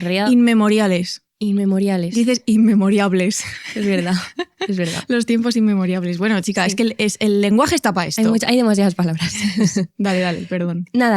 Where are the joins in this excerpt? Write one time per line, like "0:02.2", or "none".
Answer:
none